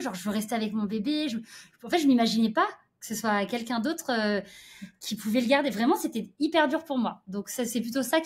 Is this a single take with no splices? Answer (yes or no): yes